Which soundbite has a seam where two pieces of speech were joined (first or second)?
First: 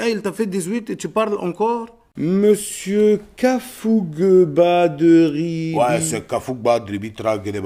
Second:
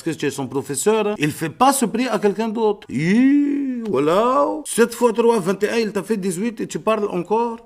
second